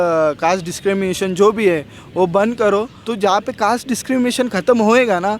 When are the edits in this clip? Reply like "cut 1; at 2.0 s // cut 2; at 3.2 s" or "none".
cut 1; at 3.0 s